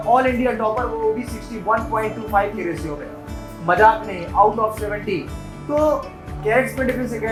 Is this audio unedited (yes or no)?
yes